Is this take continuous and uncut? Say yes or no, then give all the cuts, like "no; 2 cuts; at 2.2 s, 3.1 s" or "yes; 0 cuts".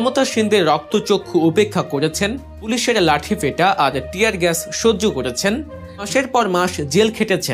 no; 2 cuts; at 2.7 s, 6.1 s